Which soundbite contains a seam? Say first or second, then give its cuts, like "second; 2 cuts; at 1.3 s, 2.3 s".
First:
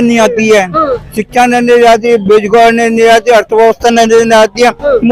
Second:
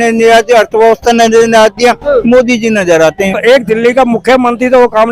second; 1 cut; at 3.4 s